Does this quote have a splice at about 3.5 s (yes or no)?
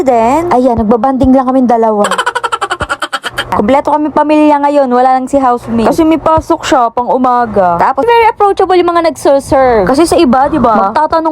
yes